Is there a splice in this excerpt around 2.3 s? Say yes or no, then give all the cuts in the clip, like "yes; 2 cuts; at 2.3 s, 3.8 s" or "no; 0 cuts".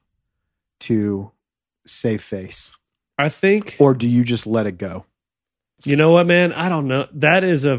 no; 1 cut; at 5.8 s